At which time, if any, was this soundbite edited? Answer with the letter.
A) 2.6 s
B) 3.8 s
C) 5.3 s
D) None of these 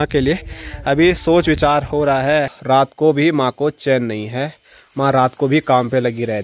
A